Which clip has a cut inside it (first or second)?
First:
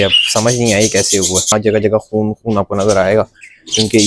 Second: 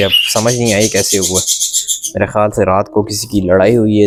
first